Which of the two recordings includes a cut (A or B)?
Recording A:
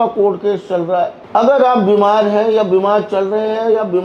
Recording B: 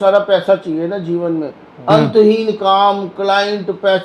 A